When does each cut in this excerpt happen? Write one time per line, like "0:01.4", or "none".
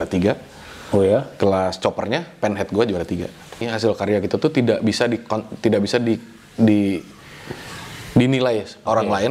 0:03.6